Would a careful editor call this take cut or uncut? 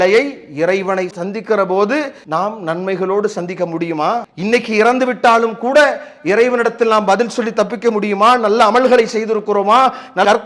cut